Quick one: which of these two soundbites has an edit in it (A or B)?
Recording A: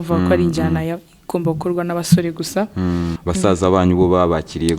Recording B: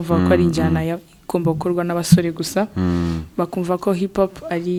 A